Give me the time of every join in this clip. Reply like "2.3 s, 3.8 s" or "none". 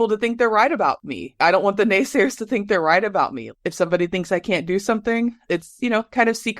1.4 s, 3.5 s, 5.5 s